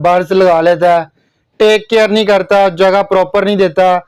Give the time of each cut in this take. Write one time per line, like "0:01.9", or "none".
none

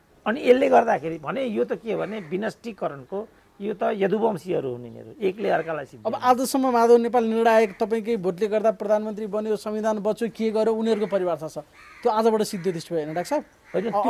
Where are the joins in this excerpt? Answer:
none

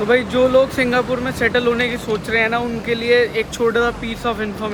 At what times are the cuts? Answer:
none

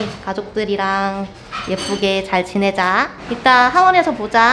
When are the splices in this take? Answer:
none

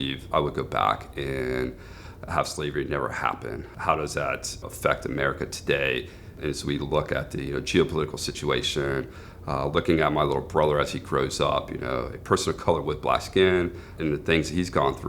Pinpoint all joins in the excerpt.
0:03.7
0:04.6
0:06.3
0:13.9

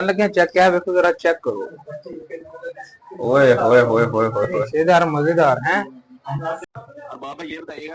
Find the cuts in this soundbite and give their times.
0:06.6

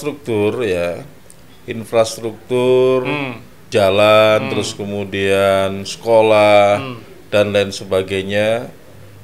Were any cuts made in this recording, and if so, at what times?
0:03.7

